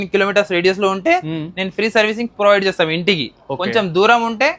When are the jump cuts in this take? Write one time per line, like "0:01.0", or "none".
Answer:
none